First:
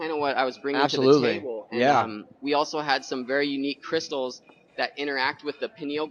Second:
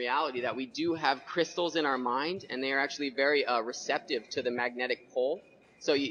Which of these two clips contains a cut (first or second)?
first